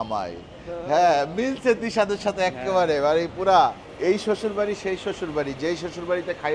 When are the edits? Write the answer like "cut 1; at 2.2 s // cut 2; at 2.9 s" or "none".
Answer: cut 1; at 3.9 s